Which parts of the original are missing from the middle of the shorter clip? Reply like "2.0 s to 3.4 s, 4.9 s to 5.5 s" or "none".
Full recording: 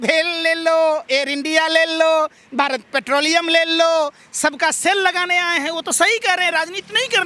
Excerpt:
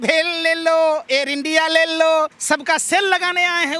2.4 s to 4.3 s